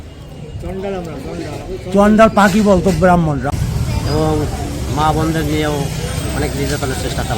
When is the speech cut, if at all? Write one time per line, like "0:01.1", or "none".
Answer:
0:03.5